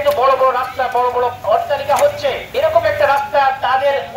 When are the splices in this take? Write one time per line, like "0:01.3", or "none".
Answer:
0:01.4
0:02.4